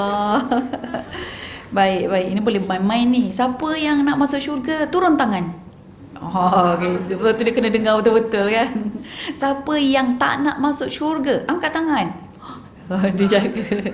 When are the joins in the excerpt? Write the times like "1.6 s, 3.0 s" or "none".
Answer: none